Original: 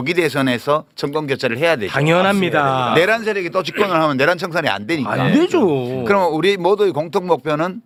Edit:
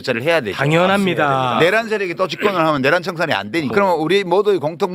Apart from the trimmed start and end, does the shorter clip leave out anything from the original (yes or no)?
yes